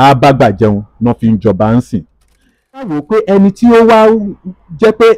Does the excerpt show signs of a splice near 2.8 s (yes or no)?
yes